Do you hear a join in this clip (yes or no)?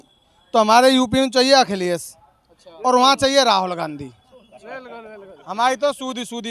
no